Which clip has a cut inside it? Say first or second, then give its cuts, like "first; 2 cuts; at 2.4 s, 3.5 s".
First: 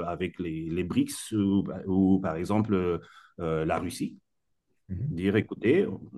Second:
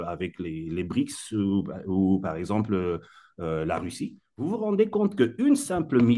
second; 1 cut; at 4.5 s